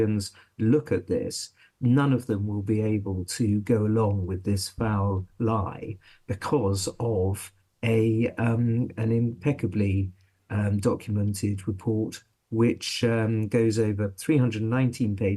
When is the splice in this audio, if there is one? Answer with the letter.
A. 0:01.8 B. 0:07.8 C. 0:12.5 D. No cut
D